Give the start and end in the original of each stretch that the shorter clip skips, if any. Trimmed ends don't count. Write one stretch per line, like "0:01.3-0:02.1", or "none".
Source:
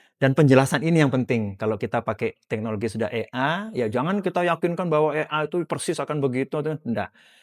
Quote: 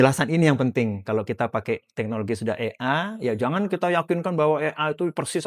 none